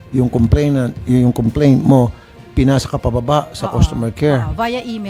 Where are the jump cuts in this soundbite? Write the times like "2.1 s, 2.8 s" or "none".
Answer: none